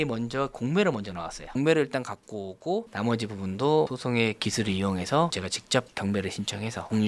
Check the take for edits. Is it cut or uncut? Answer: cut